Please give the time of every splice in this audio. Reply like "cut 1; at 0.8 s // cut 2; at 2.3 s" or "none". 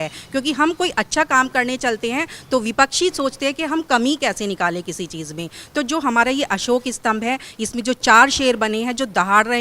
none